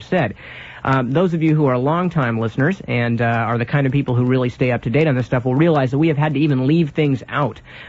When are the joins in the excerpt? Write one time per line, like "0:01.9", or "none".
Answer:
none